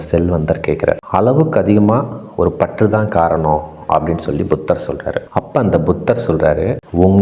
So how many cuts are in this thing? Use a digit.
2